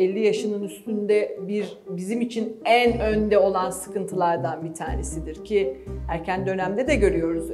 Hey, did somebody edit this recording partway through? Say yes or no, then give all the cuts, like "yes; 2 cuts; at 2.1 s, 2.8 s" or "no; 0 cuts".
no; 0 cuts